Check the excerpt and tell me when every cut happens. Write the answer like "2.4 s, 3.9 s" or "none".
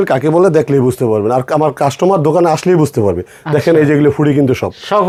none